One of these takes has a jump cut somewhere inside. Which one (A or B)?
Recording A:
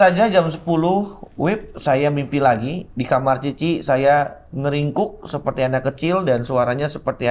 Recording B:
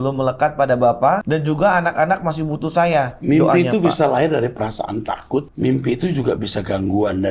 B